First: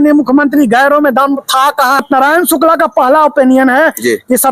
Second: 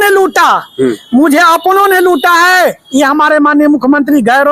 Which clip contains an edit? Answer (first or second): first